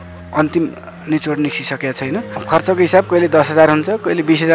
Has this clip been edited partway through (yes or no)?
yes